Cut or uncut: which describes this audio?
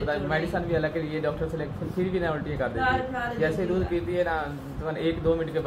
uncut